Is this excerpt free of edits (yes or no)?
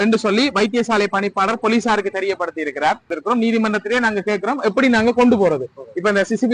no